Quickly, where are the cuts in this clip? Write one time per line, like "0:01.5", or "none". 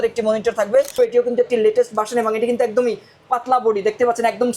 0:01.0